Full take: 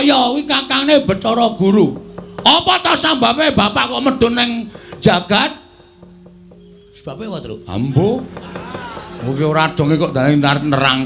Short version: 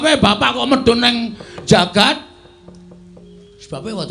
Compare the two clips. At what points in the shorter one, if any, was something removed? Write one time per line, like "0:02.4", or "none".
none